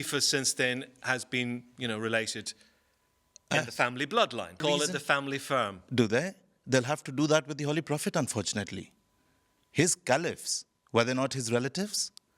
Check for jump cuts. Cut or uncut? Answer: cut